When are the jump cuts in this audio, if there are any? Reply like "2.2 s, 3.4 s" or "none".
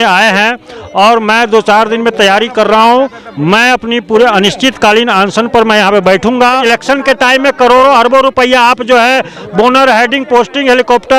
6.6 s

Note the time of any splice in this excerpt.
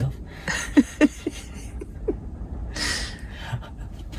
none

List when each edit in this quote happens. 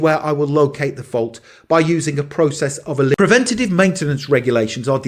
3.1 s

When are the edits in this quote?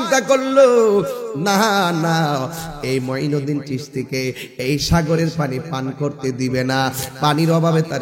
none

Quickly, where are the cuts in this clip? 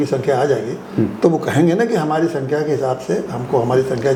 none

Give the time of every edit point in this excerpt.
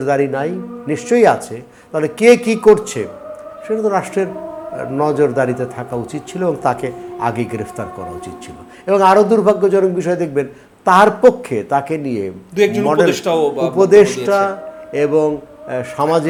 none

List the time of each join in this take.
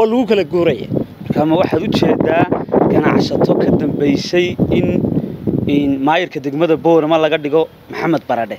none

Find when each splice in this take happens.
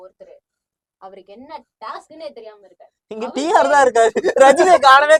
none

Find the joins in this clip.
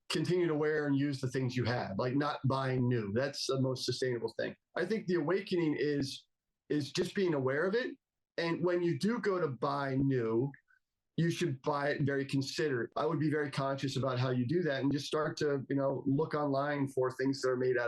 4.6 s, 12.9 s

